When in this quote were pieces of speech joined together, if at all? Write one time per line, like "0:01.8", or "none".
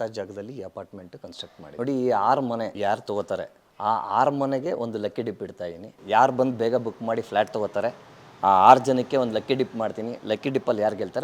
0:01.7
0:06.0